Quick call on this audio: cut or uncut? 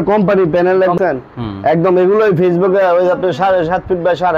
cut